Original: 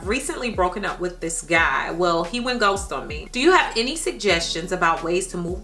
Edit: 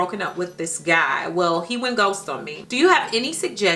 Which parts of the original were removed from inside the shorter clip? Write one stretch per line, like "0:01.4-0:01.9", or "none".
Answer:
none